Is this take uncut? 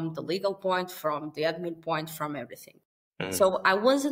yes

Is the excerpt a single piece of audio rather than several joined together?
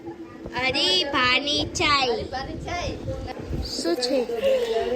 no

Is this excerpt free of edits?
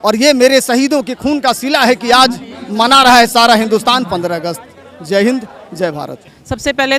yes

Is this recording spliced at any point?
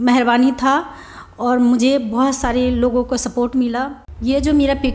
yes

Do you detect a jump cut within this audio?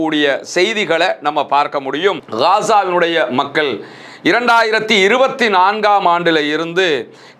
yes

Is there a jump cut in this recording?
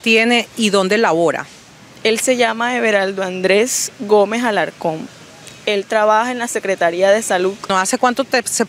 no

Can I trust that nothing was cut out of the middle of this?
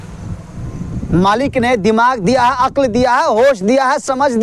yes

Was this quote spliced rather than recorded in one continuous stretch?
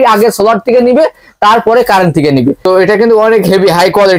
yes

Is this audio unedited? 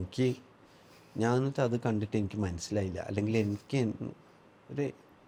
yes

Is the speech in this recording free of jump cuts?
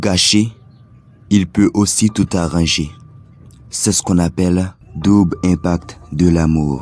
no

